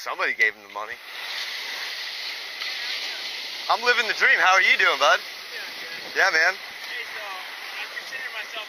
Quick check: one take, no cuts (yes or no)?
no